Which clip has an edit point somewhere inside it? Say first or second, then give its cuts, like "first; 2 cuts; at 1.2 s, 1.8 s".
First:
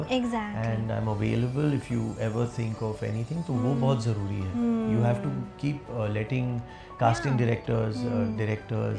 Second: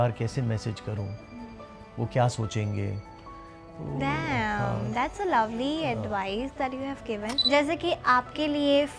second; 1 cut; at 7.3 s